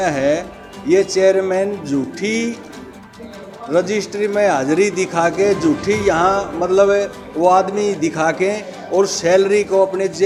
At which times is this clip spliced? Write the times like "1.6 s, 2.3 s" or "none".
none